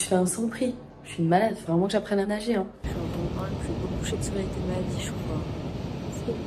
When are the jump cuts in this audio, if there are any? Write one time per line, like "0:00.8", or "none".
0:02.8